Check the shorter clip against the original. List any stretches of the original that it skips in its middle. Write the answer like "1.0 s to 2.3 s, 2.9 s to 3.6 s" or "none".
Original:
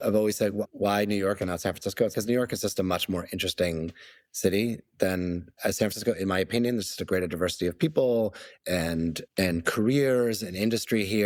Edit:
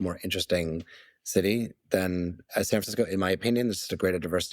none